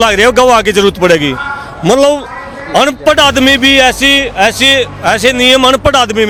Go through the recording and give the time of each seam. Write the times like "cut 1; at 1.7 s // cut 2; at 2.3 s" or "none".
none